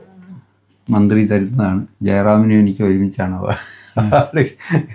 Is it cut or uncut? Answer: uncut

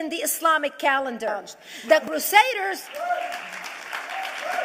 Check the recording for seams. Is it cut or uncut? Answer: cut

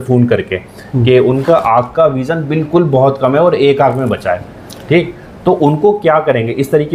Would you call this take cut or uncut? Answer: uncut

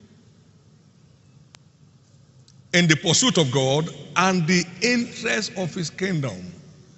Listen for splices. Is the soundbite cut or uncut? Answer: uncut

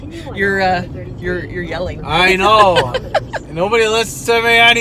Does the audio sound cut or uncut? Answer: uncut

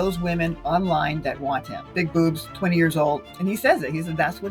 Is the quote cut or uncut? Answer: cut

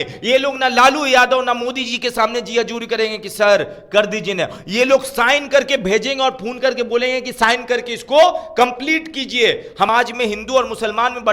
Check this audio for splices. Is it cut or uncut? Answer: cut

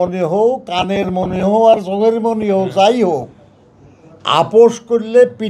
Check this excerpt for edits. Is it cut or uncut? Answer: uncut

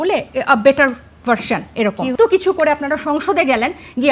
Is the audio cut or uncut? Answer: cut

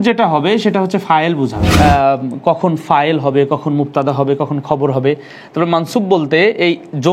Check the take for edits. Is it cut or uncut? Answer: cut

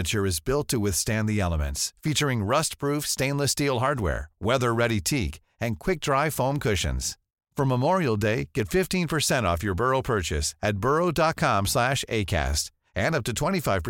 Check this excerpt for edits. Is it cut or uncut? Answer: uncut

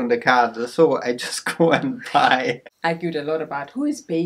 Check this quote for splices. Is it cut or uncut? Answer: cut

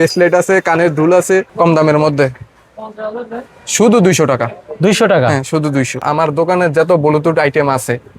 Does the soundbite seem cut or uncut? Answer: cut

